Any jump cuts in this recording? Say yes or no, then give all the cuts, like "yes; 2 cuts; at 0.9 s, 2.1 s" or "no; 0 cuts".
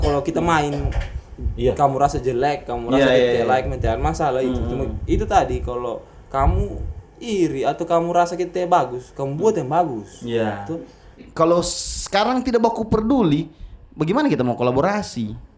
yes; 1 cut; at 11.3 s